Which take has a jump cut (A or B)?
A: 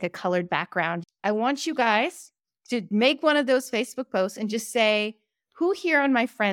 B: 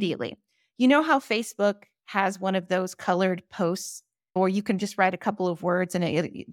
A